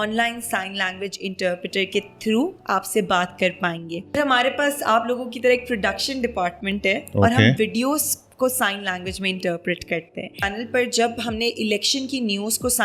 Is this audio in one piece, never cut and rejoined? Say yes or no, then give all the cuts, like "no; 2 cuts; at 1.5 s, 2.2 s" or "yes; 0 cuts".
no; 2 cuts; at 4.2 s, 10.4 s